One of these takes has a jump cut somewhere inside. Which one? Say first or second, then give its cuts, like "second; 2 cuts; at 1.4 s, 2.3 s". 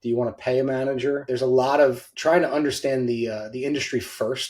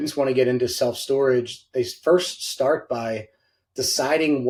first; 2 cuts; at 1.2 s, 2.1 s